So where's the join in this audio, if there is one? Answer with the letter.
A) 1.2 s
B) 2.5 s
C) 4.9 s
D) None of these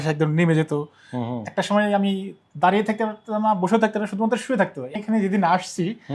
C